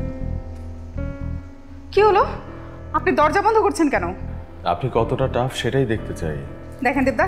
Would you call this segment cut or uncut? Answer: uncut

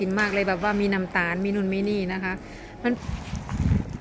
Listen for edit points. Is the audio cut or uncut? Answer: cut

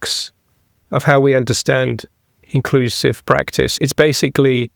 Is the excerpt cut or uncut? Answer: cut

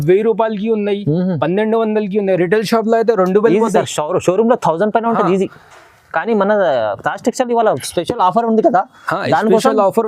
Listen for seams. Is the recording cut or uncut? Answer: uncut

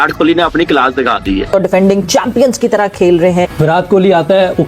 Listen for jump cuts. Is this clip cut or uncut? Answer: cut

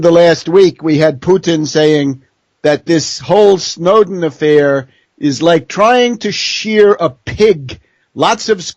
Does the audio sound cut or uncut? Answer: cut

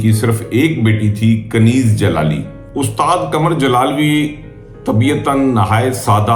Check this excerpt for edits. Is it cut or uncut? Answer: uncut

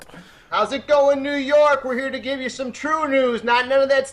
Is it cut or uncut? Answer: cut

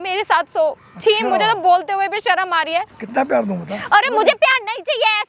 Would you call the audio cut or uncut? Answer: cut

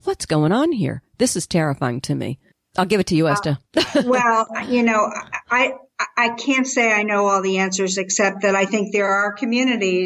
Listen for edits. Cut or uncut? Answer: uncut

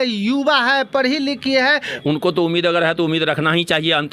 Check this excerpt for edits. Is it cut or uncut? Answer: uncut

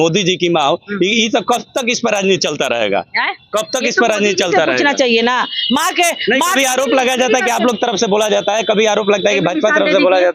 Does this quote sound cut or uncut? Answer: uncut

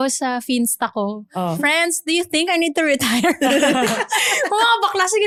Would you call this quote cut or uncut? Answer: uncut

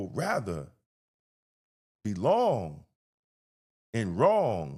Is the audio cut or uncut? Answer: uncut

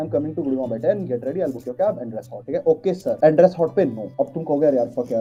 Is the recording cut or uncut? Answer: uncut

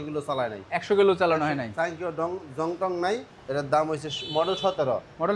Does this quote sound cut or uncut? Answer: cut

